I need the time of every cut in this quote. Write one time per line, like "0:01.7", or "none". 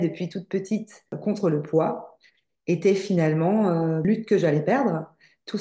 0:01.1
0:04.0